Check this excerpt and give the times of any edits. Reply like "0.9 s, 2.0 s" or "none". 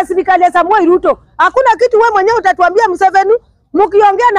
none